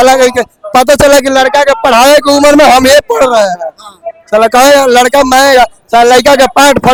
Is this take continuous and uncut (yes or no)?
yes